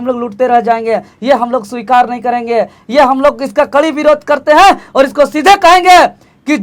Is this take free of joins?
yes; 0 cuts

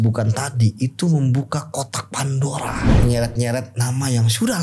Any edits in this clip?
yes; 1 cut; at 2.9 s

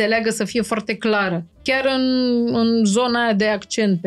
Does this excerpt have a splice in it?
yes; 1 cut; at 1.6 s

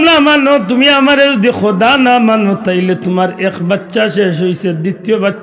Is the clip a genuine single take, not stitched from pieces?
yes; 0 cuts

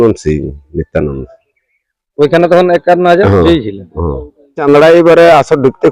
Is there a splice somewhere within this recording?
yes; 1 cut; at 4.6 s

